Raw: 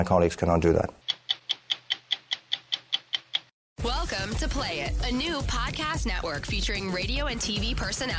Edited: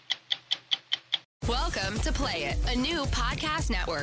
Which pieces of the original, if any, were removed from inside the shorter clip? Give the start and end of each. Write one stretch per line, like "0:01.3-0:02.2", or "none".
0:03.5-0:03.6